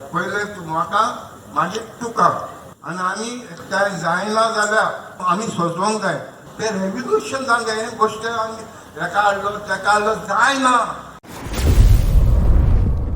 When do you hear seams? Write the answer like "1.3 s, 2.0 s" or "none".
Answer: 11.2 s